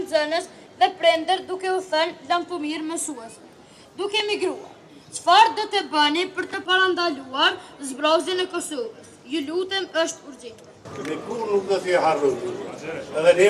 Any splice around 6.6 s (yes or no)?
yes